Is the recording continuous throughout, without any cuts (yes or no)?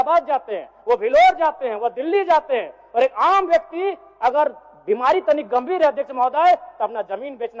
yes